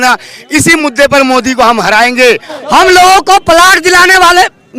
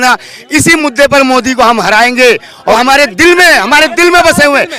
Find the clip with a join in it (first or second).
first